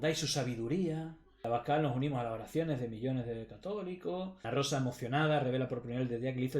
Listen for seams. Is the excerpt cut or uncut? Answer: cut